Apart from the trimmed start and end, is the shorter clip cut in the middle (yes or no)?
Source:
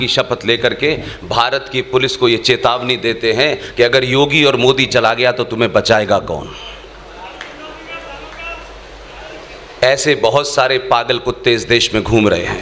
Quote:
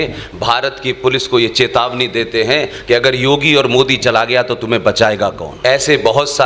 yes